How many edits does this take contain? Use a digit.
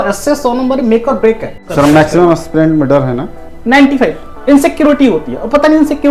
1